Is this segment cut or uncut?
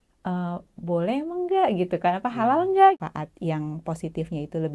cut